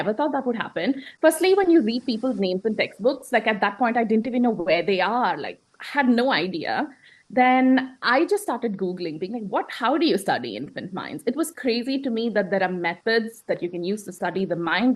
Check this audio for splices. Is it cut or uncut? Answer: uncut